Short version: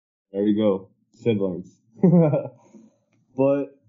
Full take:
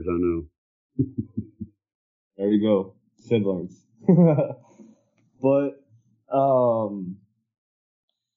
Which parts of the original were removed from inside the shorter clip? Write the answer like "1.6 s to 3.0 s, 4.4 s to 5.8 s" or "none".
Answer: none